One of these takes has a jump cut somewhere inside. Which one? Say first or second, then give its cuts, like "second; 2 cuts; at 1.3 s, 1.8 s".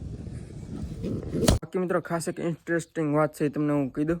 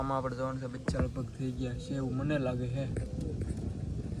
first; 1 cut; at 1.6 s